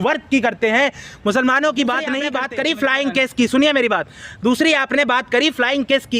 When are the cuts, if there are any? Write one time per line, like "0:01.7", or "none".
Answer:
0:02.3